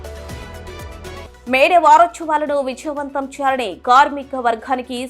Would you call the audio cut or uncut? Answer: cut